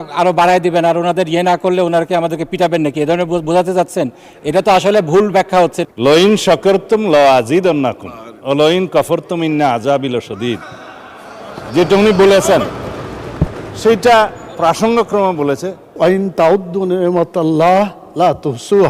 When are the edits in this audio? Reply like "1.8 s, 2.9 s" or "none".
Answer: 5.8 s, 15.9 s